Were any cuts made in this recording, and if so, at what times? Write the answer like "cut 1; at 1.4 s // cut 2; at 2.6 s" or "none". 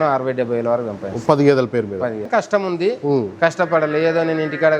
cut 1; at 2.3 s